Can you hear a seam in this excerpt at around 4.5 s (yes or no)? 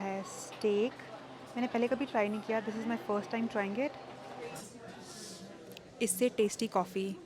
yes